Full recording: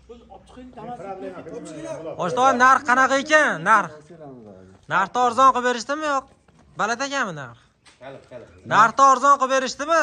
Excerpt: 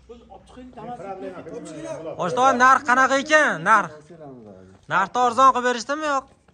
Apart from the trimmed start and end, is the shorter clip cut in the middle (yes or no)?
no